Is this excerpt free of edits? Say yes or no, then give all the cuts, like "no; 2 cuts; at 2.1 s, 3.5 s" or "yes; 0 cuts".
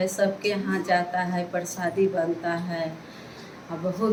yes; 0 cuts